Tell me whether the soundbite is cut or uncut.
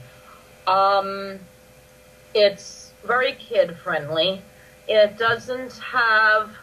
uncut